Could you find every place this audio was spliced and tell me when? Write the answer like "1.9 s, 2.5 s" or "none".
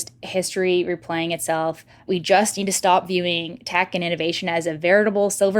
2.1 s